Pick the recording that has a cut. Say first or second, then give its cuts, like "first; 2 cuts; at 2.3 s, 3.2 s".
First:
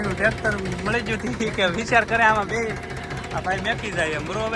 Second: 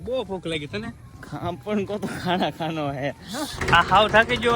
second; 1 cut; at 3.2 s